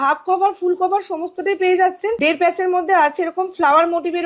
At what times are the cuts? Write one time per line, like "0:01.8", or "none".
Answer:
0:02.2